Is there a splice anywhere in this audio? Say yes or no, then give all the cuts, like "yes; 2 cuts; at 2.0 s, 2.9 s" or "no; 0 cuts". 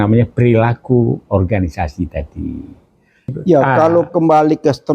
yes; 1 cut; at 3.4 s